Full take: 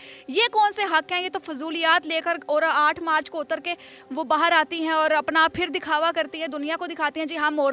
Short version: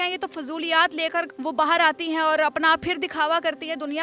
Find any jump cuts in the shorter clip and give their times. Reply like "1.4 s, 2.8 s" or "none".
1.3 s